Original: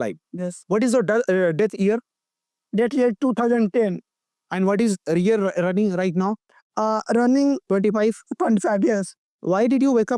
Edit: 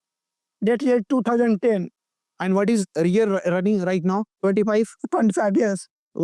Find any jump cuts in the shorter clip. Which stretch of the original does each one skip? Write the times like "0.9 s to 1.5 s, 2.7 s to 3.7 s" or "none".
6.5 s to 7.6 s

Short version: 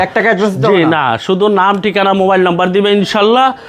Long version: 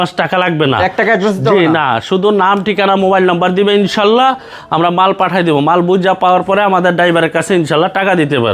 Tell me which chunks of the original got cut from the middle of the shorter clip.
none

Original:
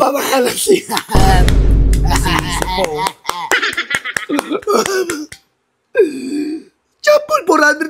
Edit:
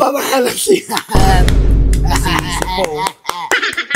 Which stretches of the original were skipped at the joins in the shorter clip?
none

